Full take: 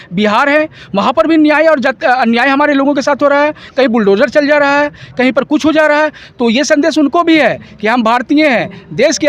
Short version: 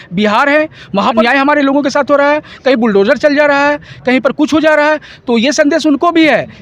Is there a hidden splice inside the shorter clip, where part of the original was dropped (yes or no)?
yes